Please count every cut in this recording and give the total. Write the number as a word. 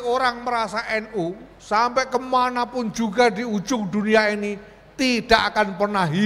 one